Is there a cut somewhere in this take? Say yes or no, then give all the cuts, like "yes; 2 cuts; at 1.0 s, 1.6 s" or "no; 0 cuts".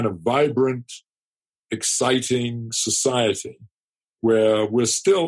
no; 0 cuts